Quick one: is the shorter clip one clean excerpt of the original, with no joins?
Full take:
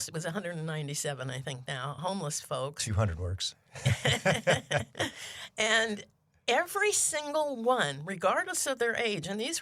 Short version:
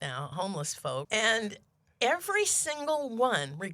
no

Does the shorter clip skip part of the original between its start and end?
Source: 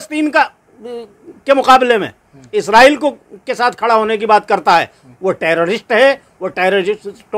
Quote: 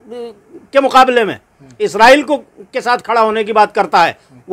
no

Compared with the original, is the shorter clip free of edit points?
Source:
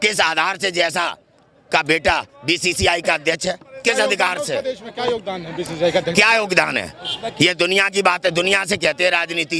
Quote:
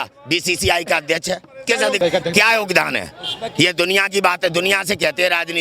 no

